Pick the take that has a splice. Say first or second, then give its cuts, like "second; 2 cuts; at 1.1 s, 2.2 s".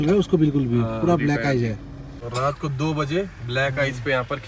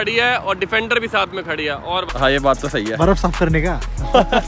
second; 1 cut; at 2.1 s